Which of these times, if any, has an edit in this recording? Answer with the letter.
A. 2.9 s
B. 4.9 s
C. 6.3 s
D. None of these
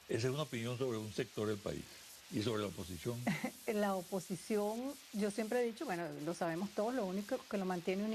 A